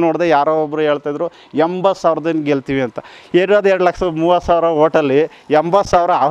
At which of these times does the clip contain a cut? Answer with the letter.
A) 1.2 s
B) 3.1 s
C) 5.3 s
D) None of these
D